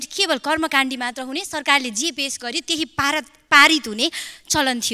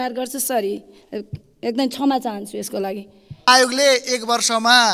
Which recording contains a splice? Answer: second; 1 cut; at 3.5 s

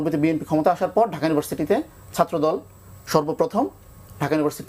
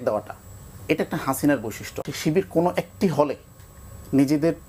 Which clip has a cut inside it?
second; 1 cut; at 2.1 s

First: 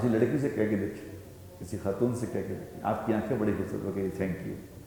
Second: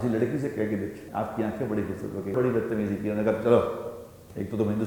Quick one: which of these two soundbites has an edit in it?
second; 2 cuts; at 1.0 s, 2.3 s

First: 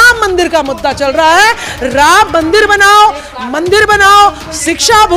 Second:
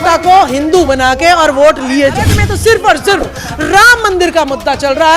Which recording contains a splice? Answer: second; 1 cut; at 2.4 s

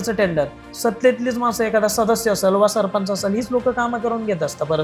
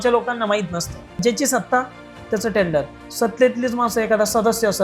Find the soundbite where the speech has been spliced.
second; 1 cut; at 1.2 s

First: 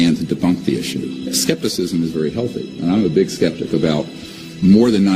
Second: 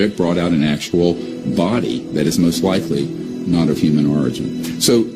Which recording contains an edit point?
first; 1 cut; at 1.3 s

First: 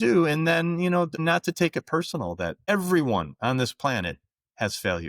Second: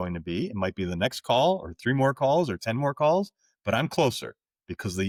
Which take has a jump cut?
first; 2 cuts; at 1.2 s, 2.6 s

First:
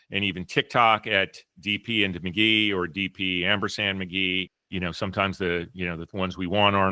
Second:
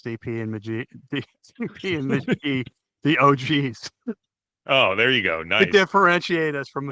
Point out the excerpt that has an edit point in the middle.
first; 1 cut; at 4.6 s

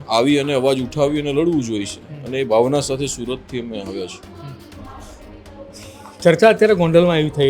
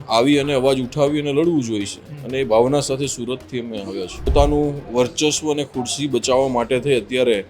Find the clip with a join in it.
second; 1 cut; at 4.3 s

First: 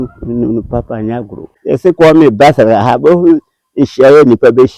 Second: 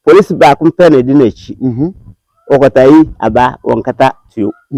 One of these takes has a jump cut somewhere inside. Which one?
first; 1 cut; at 1.5 s

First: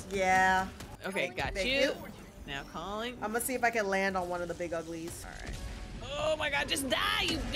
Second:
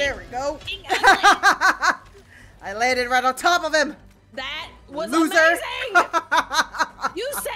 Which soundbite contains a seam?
first; 2 cuts; at 1.0 s, 5.2 s

